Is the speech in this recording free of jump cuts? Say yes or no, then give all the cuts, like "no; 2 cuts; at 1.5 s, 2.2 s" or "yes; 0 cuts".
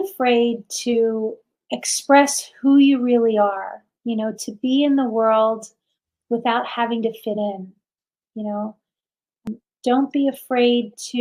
no; 1 cut; at 9.5 s